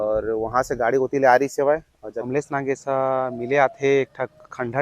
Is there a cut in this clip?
yes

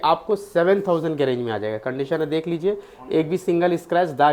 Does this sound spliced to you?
no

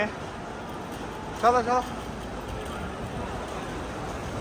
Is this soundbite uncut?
yes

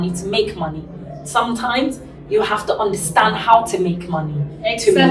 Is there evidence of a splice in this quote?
no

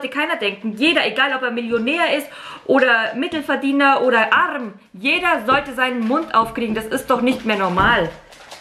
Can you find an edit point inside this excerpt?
no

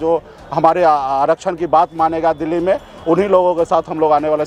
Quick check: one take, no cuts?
yes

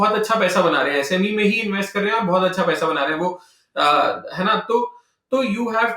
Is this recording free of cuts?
yes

